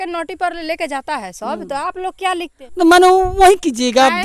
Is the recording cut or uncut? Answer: cut